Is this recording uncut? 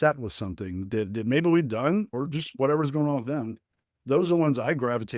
no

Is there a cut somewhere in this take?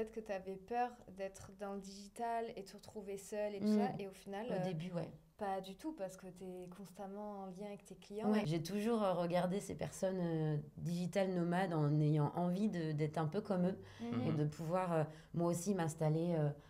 yes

